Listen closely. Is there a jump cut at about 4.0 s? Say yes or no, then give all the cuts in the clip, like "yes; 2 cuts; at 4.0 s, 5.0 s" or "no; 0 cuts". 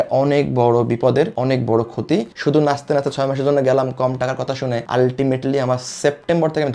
no; 1 cut; at 2.3 s